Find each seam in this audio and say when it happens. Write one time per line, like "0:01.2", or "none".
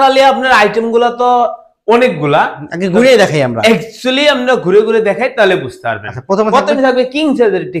none